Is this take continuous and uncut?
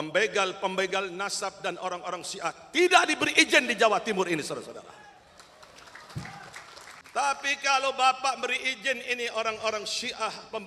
no; 1 cut; at 7.0 s

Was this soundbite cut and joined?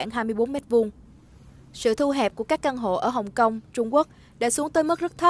no; 0 cuts

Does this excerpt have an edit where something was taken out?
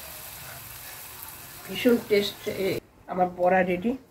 yes; 1 cut; at 2.8 s

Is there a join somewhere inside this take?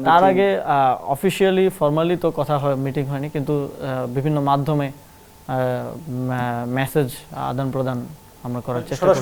no; 0 cuts

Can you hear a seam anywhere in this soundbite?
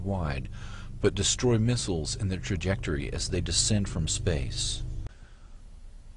no; 0 cuts

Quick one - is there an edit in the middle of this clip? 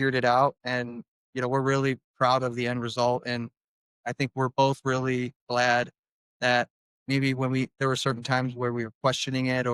no; 0 cuts

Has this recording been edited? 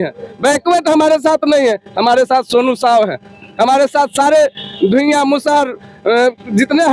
no; 0 cuts

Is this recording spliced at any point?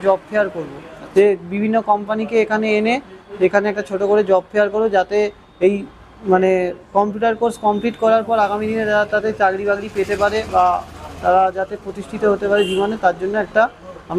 no; 0 cuts

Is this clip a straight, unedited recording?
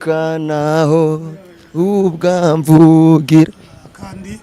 yes; 0 cuts

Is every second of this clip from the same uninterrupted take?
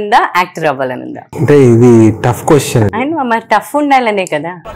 yes; 0 cuts

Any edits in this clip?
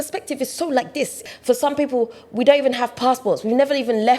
yes; 1 cut; at 1.2 s

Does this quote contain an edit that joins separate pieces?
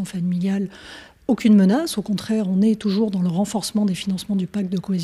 yes; 1 cut; at 2.4 s

